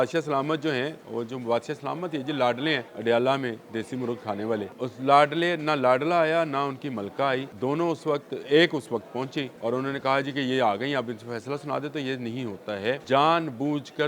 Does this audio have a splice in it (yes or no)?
yes